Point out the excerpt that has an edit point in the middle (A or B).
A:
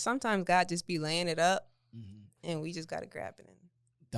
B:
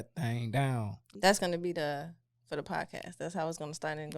B